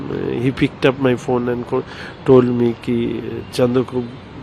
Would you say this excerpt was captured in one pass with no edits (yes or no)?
yes